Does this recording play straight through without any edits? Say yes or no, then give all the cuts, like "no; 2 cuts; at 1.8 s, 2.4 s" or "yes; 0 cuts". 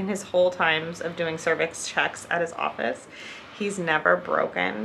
yes; 0 cuts